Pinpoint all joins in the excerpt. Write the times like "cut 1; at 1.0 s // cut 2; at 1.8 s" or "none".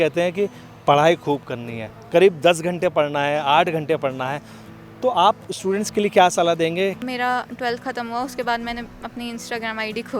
cut 1; at 7.0 s